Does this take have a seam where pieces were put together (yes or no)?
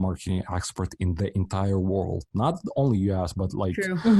no